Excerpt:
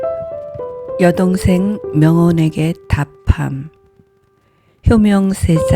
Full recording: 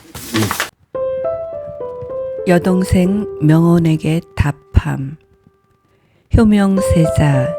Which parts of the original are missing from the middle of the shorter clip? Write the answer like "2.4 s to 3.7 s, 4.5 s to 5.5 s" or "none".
2.1 s to 2.4 s